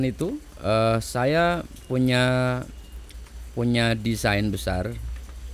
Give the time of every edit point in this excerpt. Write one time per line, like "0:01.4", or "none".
none